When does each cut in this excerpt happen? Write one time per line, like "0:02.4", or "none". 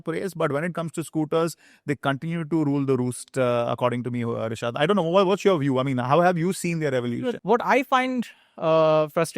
none